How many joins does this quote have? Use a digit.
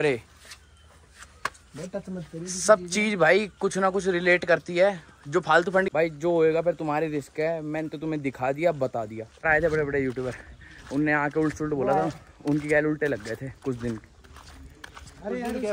2